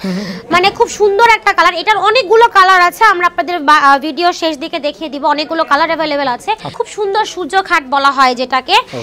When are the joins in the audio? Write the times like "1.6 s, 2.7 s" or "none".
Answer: 6.7 s